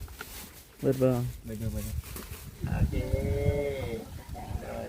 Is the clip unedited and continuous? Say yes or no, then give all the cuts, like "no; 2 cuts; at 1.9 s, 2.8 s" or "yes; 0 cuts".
no; 1 cut; at 2.5 s